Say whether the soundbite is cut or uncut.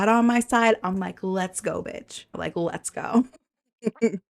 cut